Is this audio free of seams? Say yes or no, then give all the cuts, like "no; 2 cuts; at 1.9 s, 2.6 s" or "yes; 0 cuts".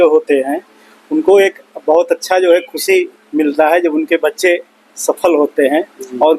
yes; 0 cuts